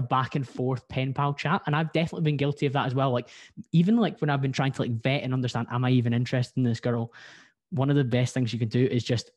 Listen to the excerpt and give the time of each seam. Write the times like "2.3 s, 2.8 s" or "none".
none